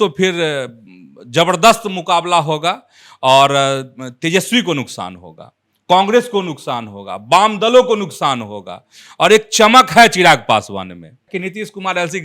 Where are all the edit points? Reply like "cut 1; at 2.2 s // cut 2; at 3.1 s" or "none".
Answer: cut 1; at 11.2 s